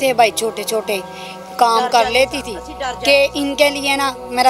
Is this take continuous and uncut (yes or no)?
yes